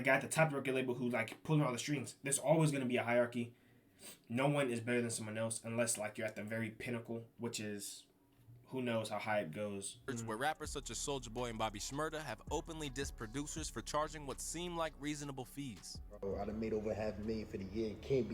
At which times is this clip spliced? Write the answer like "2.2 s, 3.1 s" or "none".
10.1 s